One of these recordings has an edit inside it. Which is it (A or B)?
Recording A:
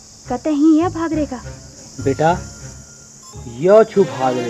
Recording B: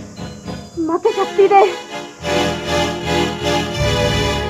B